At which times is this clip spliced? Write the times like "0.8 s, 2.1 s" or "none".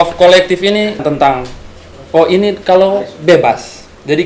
1.0 s